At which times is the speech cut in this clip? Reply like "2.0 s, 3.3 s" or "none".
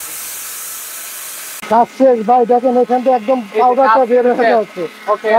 1.6 s